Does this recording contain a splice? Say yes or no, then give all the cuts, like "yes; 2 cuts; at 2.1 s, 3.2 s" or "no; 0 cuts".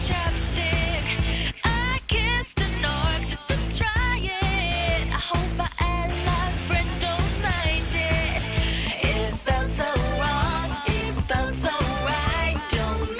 no; 0 cuts